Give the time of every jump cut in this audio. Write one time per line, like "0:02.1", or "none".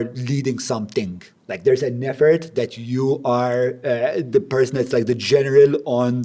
none